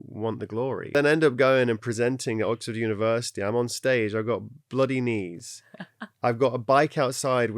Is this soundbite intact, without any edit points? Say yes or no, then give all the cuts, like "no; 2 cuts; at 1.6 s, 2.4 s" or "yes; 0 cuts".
no; 1 cut; at 0.9 s